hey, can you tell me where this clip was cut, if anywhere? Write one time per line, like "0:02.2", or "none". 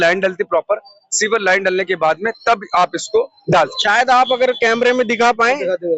none